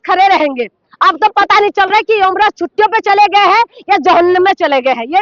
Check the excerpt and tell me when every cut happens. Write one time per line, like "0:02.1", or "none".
none